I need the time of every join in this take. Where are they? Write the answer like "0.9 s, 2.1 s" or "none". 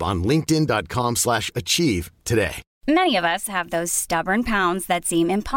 2.7 s